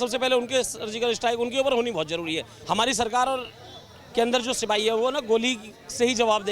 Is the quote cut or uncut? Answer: cut